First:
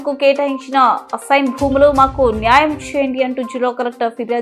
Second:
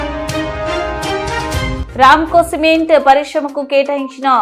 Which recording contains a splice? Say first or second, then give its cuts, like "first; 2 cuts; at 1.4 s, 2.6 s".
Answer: second; 1 cut; at 1.8 s